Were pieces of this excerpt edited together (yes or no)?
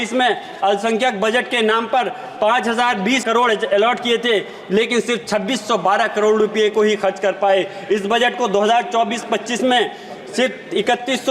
yes